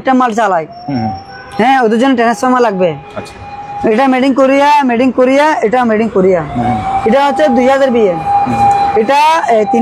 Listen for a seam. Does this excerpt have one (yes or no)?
no